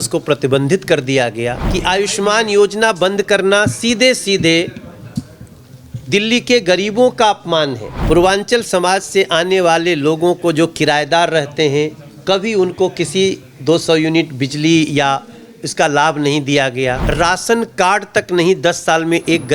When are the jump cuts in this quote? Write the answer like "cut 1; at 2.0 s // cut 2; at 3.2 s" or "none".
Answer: cut 1; at 1.7 s // cut 2; at 7.9 s // cut 3; at 17.0 s